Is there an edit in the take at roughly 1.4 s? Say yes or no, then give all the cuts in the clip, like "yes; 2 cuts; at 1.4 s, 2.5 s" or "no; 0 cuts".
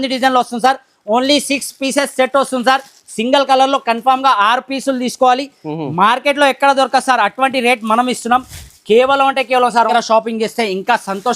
no; 1 cut; at 9.8 s